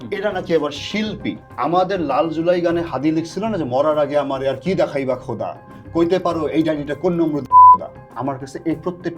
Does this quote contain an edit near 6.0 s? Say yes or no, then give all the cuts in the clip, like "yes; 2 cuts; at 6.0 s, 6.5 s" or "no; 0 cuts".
no; 2 cuts; at 1.5 s, 8.0 s